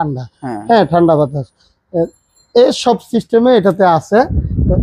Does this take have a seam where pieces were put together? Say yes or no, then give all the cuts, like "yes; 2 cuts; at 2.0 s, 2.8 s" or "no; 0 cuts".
no; 0 cuts